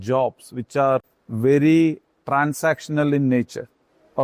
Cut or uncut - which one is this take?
cut